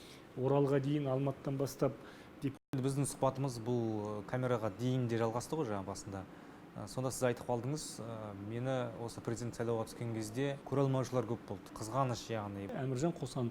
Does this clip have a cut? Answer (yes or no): yes